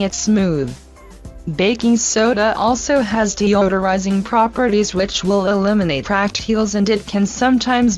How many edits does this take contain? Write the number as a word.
zero